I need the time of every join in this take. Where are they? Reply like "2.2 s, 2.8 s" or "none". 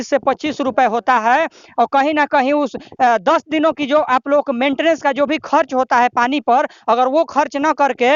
none